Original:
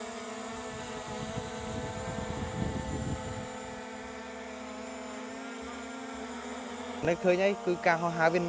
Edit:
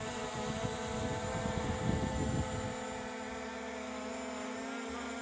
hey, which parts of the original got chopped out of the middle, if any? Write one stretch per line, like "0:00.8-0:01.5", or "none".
none

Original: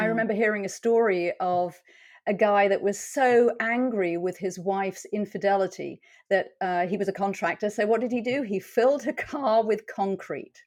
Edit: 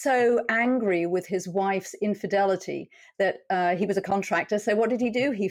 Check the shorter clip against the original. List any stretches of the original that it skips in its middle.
none

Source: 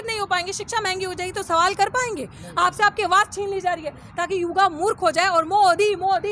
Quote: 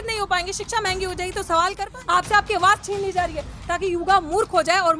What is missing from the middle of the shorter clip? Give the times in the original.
0:01.8-0:02.2

